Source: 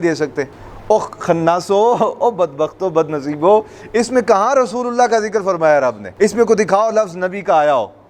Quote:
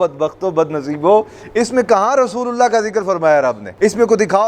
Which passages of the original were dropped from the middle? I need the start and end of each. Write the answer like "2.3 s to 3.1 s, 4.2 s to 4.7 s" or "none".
none